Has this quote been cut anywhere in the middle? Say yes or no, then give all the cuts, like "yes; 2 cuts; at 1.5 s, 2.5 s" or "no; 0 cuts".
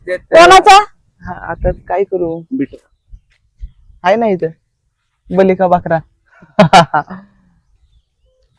no; 0 cuts